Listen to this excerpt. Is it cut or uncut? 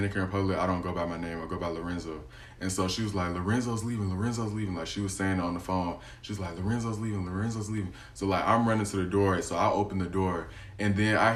uncut